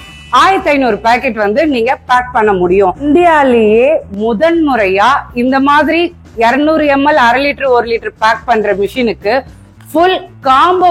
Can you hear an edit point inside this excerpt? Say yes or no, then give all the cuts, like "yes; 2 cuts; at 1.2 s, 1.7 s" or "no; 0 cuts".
no; 0 cuts